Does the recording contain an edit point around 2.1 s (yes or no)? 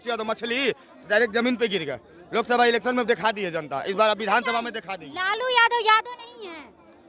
no